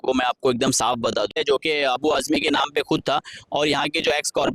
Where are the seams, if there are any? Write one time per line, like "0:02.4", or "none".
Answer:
0:01.3

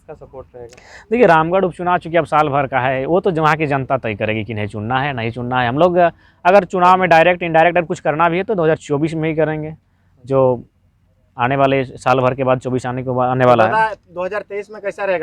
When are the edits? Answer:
none

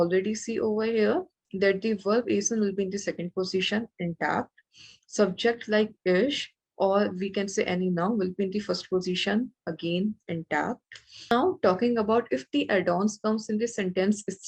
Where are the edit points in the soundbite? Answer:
0:11.3

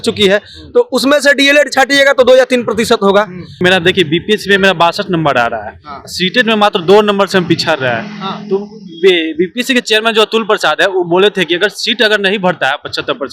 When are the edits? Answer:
0:03.5

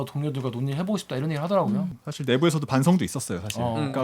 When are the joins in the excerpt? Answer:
0:01.9

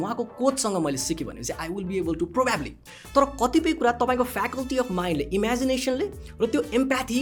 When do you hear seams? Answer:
0:02.9

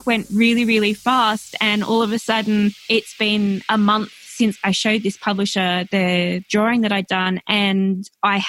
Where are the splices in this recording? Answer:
0:02.8
0:04.6
0:06.5

